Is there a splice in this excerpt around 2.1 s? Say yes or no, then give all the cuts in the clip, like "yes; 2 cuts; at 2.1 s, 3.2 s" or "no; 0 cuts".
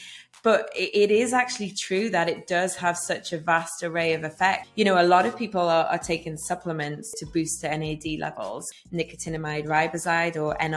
no; 3 cuts; at 4.7 s, 7.2 s, 8.7 s